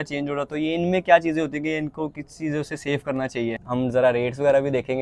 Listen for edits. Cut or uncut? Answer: cut